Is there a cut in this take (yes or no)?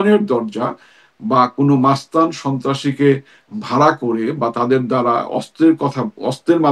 no